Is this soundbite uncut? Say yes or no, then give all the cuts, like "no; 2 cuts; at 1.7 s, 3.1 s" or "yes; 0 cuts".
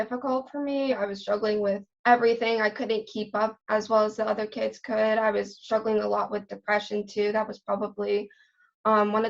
no; 1 cut; at 0.9 s